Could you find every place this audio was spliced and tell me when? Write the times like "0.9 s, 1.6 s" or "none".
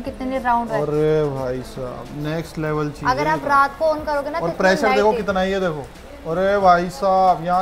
none